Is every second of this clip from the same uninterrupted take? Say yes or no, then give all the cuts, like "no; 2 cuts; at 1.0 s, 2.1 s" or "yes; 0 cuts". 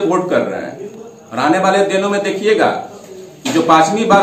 yes; 0 cuts